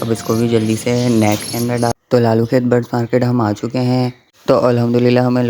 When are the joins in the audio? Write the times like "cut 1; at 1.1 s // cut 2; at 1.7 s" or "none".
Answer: cut 1; at 1.9 s // cut 2; at 4.2 s